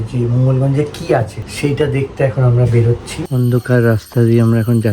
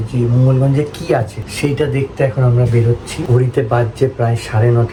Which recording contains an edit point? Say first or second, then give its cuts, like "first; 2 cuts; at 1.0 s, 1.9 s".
first; 1 cut; at 3.1 s